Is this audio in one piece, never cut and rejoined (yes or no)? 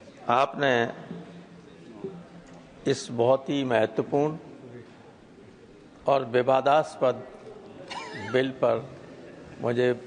yes